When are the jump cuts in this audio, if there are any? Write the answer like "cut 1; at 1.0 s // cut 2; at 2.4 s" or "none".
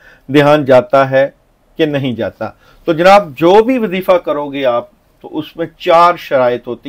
none

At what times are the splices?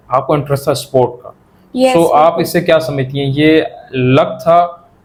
none

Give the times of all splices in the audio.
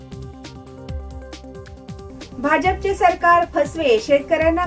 cut 1; at 1.8 s

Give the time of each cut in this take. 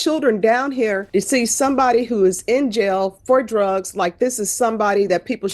cut 1; at 1.0 s

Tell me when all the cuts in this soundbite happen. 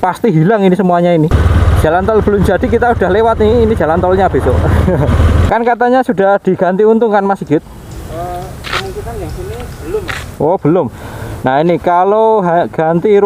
cut 1; at 1.4 s // cut 2; at 5.4 s

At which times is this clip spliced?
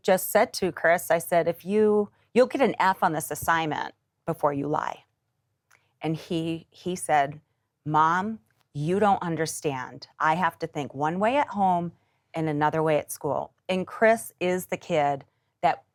none

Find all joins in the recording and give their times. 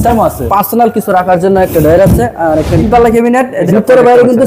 cut 1; at 2.4 s // cut 2; at 3.7 s

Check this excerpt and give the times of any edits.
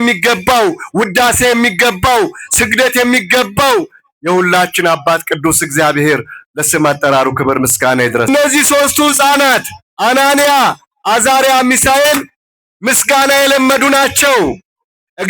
cut 1; at 8.3 s

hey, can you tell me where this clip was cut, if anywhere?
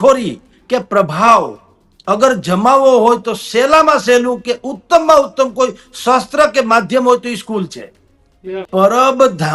cut 1; at 8.7 s

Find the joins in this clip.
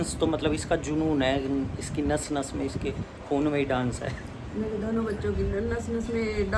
none

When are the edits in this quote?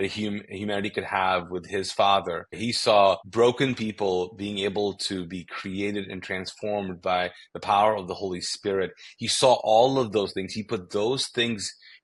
cut 1; at 2.6 s // cut 2; at 3.2 s

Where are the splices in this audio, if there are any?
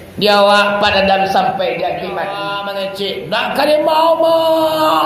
cut 1; at 2.4 s

